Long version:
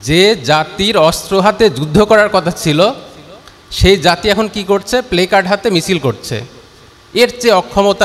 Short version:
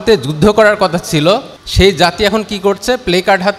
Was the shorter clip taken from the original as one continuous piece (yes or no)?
no